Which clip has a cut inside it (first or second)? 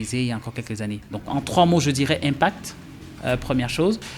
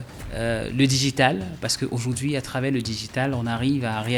first